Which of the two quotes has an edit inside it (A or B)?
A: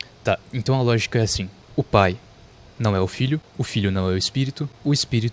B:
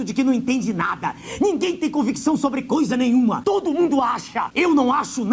B